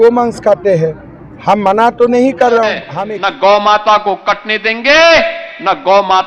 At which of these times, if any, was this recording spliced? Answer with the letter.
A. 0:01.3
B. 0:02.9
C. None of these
B